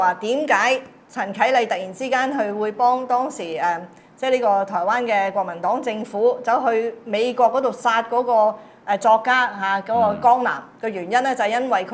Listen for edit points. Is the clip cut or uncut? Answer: uncut